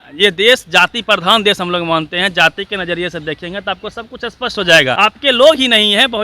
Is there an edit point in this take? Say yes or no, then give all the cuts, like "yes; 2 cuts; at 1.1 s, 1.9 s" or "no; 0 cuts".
yes; 1 cut; at 5.0 s